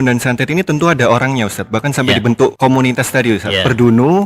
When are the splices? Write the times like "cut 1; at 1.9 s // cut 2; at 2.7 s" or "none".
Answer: cut 1; at 2.5 s